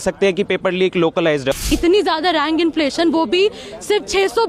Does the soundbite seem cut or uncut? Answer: cut